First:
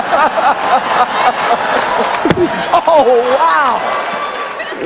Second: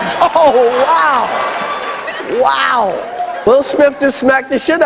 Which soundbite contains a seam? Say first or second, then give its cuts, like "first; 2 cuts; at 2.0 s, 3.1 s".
second; 1 cut; at 3.5 s